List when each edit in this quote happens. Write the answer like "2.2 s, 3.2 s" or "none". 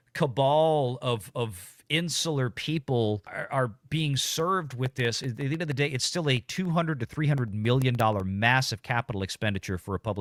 none